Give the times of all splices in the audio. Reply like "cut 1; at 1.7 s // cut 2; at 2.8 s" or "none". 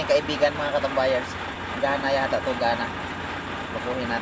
cut 1; at 1.5 s